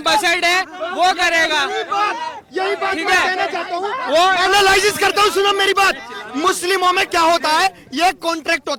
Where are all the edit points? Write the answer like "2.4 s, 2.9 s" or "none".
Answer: none